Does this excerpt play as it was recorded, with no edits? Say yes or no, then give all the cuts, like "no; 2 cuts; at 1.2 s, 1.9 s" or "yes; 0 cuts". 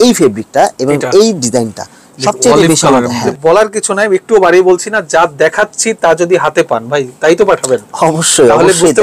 no; 1 cut; at 3.3 s